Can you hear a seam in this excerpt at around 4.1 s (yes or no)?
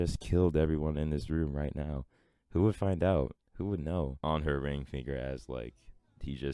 yes